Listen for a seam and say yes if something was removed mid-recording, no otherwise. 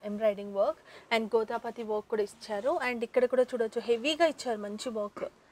no